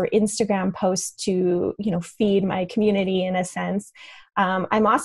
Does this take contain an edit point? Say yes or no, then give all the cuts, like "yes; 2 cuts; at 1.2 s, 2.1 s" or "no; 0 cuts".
no; 0 cuts